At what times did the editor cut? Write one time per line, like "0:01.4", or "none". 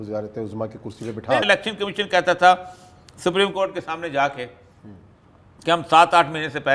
0:01.4

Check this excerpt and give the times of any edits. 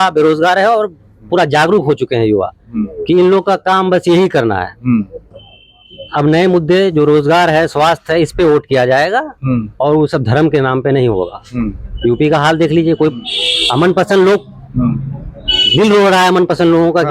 none

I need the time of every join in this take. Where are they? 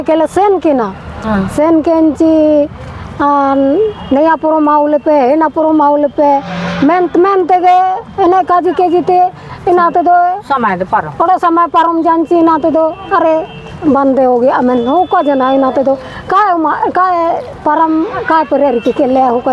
none

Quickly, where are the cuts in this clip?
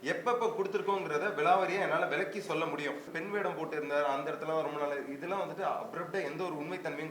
0:03.1

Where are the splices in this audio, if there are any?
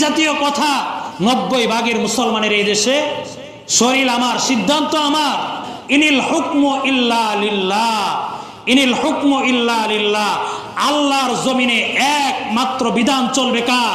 0:05.7

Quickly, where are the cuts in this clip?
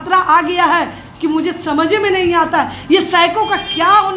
none

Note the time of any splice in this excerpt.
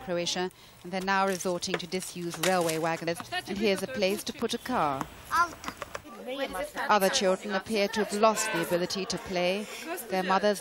none

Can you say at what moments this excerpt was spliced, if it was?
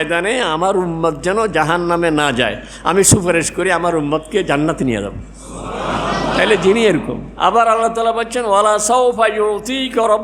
none

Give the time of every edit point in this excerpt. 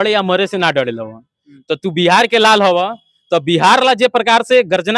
none

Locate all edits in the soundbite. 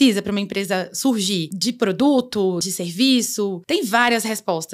0:01.5
0:02.6
0:03.6

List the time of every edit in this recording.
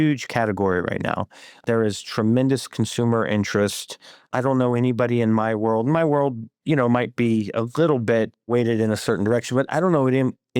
0:01.6
0:04.2
0:08.5

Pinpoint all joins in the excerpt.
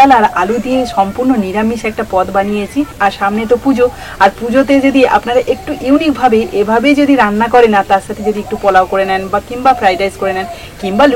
none

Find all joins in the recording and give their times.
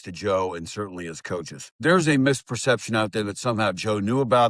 0:01.8

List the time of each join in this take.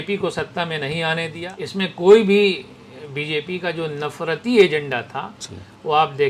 0:01.4

